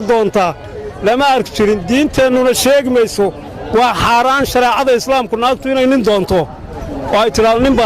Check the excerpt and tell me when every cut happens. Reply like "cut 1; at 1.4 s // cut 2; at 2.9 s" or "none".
none